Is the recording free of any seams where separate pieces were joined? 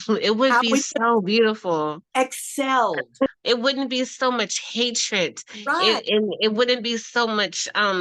no; 1 cut; at 3.3 s

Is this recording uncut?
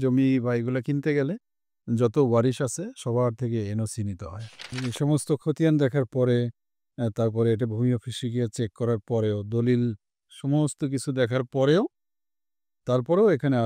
no; 1 cut; at 4.8 s

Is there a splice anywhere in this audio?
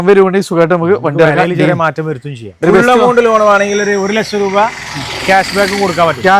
yes; 1 cut; at 2.5 s

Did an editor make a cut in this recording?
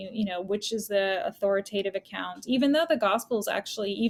no; 0 cuts

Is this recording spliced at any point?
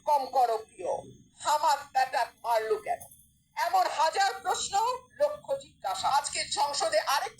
yes; 1 cut; at 6.1 s

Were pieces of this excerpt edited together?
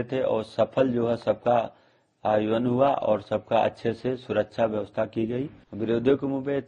yes; 1 cut; at 5.6 s

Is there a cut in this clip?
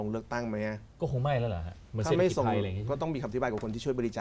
no; 0 cuts

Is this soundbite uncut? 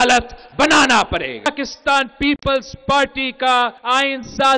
no; 2 cuts; at 1.5 s, 3.8 s

